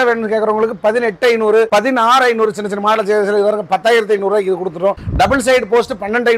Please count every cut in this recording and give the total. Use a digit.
0